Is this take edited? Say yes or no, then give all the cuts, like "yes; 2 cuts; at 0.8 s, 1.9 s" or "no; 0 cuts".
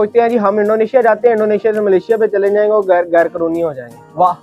no; 0 cuts